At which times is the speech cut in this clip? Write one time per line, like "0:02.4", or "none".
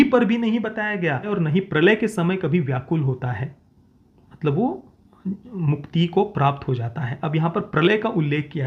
0:01.3

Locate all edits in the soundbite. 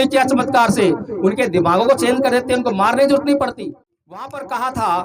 0:03.6

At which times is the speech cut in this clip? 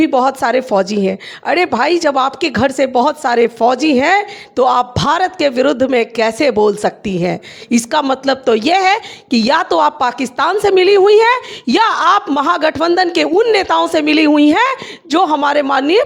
none

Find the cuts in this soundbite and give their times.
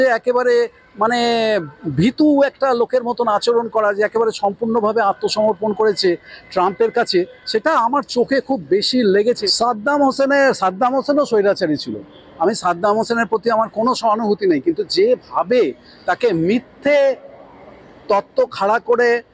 0:09.4

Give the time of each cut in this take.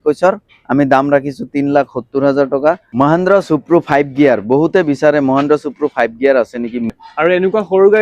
0:02.9
0:06.9

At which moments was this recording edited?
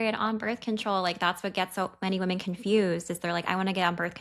none

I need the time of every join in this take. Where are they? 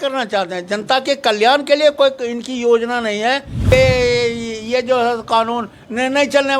0:03.7

